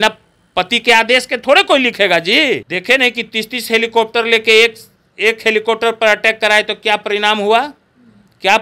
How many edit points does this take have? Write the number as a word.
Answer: one